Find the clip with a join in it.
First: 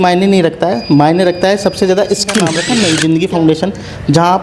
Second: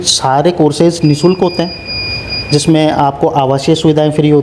first; 1 cut; at 2.6 s

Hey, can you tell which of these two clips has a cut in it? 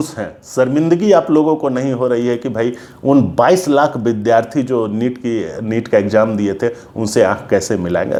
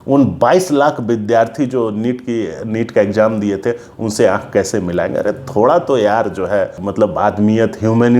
second; 1 cut; at 6.8 s

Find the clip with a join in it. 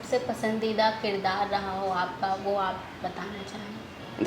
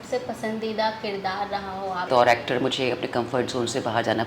second; 1 cut; at 2.1 s

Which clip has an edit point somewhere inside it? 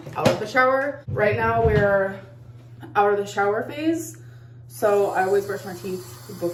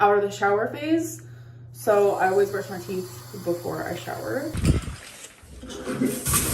second; 1 cut; at 4.6 s

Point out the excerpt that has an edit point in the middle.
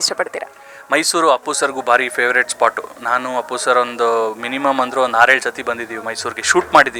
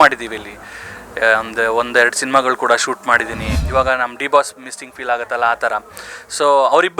second; 1 cut; at 3.5 s

